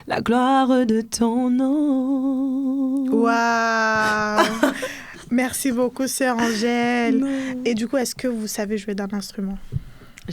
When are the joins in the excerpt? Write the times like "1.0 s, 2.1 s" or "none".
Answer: none